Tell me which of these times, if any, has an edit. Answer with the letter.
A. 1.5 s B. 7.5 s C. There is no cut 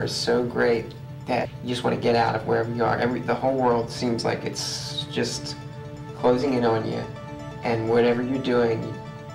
A